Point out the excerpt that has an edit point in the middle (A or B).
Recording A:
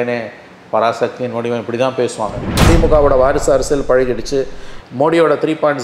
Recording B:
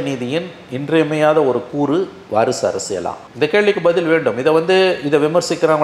A